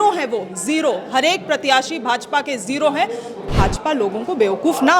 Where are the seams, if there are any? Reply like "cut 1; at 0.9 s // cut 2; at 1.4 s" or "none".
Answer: cut 1; at 3.5 s